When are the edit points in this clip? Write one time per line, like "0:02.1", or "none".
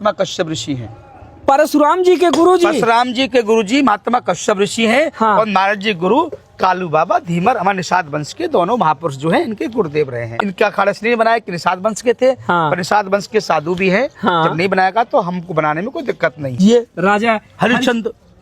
0:10.3
0:16.5